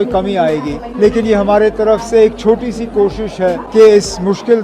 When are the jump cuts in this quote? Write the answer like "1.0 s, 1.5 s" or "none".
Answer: 0.8 s, 3.6 s